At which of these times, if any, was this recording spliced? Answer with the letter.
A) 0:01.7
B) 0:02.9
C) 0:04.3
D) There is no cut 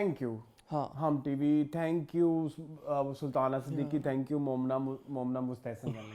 D